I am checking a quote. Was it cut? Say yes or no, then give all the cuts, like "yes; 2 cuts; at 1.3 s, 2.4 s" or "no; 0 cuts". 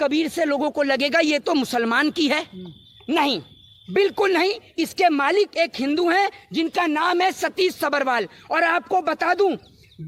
no; 0 cuts